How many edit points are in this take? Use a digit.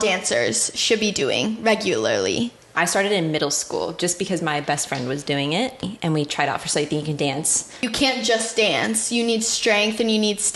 3